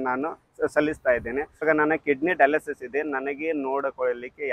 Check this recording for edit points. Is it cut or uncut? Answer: cut